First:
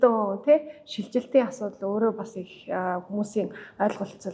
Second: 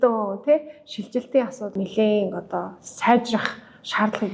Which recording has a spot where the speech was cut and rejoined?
second; 1 cut; at 1.7 s

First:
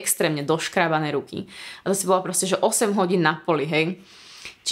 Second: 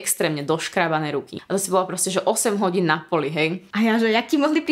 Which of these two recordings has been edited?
second; 2 cuts; at 1.3 s, 3.6 s

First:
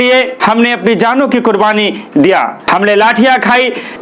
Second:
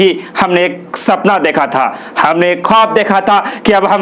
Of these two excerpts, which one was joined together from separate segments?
first; 1 cut; at 2.6 s

